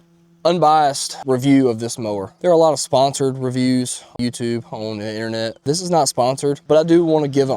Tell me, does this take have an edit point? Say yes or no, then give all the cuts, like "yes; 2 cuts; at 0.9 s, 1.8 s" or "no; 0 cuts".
yes; 1 cut; at 6.6 s